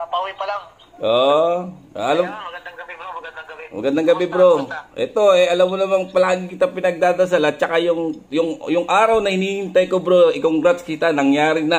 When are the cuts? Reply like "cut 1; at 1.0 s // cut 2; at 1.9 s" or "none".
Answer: none